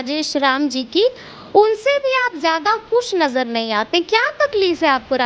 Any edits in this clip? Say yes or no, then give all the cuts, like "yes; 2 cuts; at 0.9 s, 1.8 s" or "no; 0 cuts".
no; 0 cuts